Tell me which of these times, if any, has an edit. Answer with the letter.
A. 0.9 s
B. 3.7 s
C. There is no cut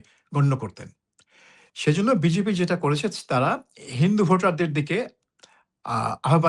C